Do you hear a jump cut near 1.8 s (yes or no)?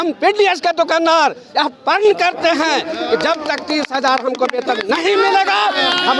no